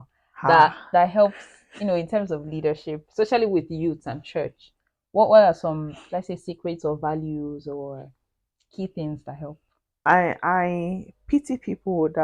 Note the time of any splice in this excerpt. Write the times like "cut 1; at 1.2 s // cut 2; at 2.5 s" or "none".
cut 1; at 10.0 s

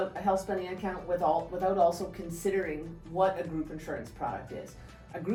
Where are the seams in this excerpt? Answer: none

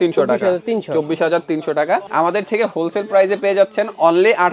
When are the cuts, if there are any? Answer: cut 1; at 2.1 s

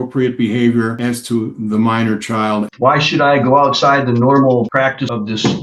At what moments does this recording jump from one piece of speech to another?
cut 1; at 2.7 s

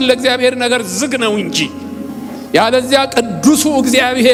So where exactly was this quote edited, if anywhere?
none

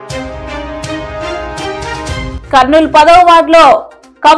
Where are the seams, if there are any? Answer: cut 1; at 2.4 s

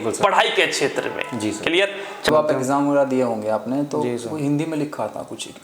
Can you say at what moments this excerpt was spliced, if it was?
cut 1; at 2.3 s

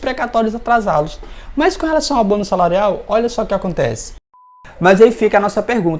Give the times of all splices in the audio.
cut 1; at 4.5 s

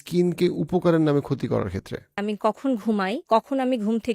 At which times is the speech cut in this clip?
cut 1; at 2.2 s // cut 2; at 3.2 s

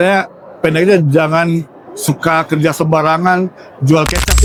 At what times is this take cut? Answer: none

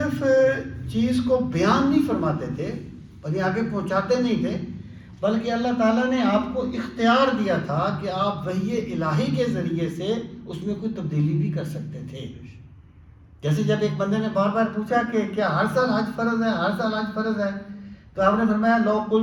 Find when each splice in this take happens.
none

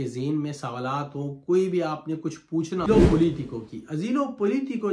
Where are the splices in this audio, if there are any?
cut 1; at 2.9 s

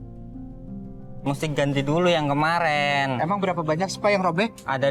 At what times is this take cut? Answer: cut 1; at 1.2 s

